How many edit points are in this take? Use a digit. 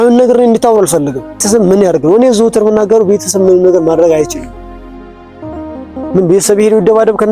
3